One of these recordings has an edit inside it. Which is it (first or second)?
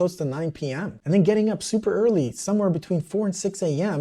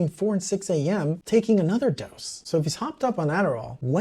second